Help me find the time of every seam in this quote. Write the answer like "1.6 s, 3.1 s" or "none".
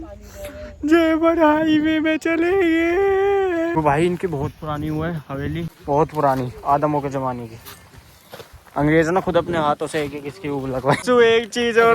3.8 s, 5.7 s, 11.0 s